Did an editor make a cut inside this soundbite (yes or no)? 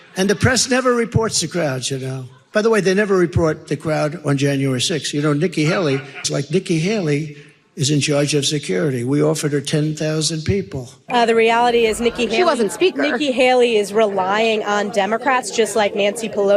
yes